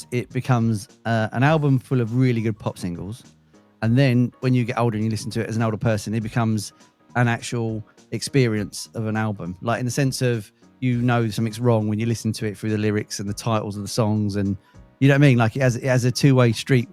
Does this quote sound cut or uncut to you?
uncut